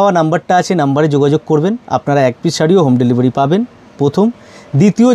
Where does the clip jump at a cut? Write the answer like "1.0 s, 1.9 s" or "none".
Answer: none